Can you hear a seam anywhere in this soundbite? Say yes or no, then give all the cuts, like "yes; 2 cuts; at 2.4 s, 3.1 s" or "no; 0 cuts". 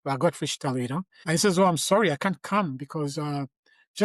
yes; 1 cut; at 1.1 s